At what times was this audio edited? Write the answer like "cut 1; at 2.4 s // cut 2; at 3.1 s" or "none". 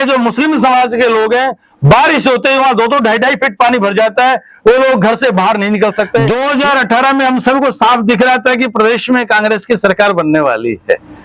cut 1; at 6.3 s